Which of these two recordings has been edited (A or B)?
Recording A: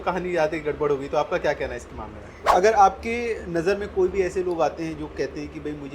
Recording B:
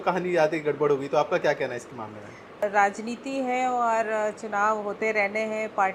A